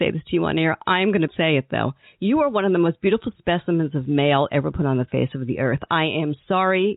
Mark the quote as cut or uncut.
cut